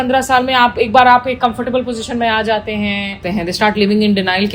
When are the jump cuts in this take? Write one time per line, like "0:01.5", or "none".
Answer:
0:03.2